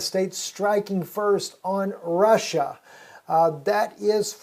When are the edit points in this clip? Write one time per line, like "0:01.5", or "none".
0:02.9